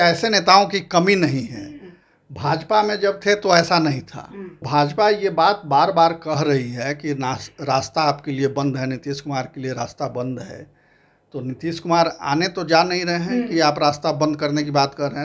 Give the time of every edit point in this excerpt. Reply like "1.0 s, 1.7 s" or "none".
4.6 s